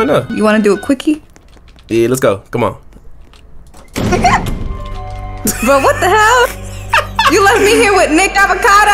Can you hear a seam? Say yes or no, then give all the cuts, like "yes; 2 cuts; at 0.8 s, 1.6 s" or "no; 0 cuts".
no; 0 cuts